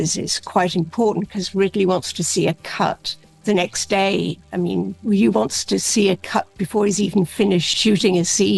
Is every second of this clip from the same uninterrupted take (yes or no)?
yes